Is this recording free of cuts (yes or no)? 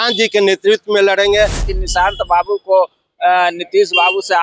no